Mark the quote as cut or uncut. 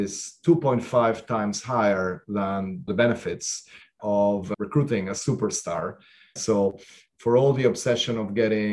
cut